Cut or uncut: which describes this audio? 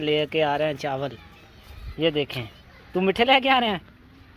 uncut